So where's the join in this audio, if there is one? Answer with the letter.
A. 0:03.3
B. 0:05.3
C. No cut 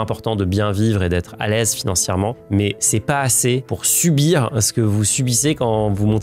C